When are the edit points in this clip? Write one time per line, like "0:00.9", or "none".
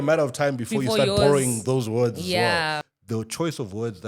0:02.9

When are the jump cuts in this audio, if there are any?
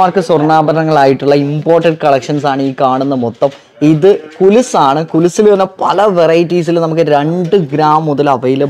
none

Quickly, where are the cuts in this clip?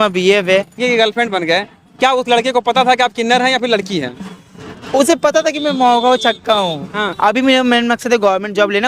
0:00.8
0:07.1

